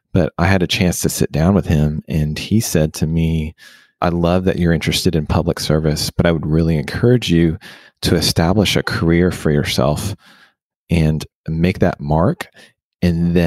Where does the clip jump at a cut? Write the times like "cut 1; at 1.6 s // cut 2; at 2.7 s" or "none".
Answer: cut 1; at 3.8 s